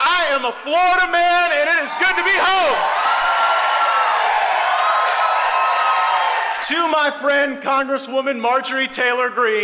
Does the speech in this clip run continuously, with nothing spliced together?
no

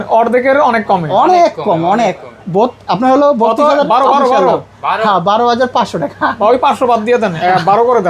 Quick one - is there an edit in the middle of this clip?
no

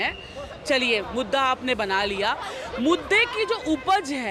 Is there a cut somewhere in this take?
no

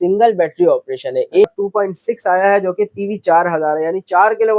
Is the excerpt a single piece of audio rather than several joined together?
no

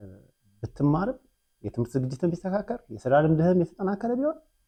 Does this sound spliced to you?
no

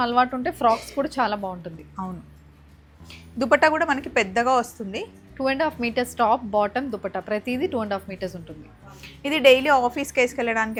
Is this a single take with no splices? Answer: yes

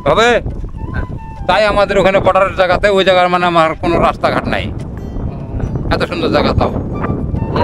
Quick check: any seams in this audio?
no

